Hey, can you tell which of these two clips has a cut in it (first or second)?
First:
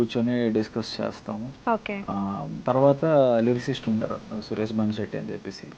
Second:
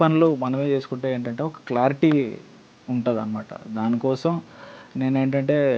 first